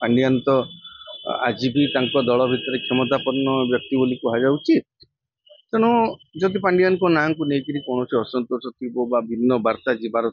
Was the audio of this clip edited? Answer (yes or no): no